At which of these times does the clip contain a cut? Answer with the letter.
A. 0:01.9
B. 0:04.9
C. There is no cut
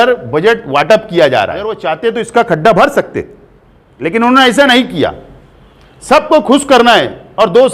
A